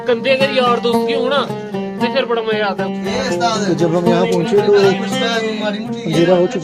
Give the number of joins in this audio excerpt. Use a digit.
0